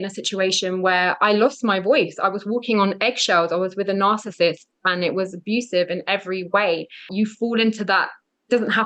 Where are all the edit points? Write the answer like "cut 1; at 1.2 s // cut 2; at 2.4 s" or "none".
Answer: cut 1; at 7.1 s